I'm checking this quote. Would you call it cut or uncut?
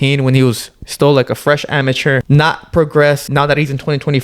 cut